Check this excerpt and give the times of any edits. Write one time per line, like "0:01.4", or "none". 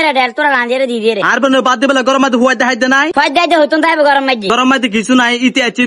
none

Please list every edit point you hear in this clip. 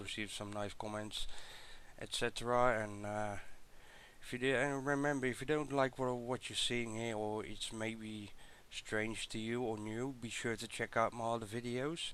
none

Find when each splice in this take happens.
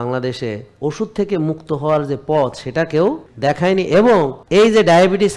0:03.3
0:04.4

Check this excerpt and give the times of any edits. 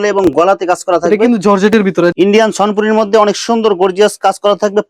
0:02.1

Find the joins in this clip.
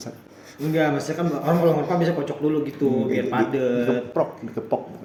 none

